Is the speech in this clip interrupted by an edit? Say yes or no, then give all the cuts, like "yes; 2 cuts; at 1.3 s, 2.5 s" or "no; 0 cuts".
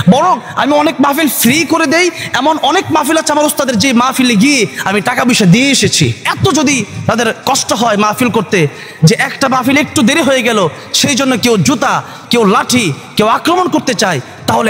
yes; 1 cut; at 6.3 s